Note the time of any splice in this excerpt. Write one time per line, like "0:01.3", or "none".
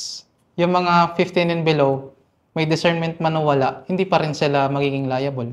none